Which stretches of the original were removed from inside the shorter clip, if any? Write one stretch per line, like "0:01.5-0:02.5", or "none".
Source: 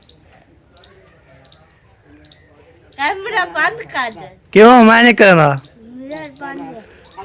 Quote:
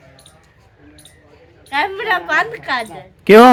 none